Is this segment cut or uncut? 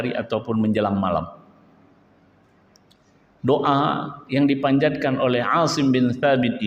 uncut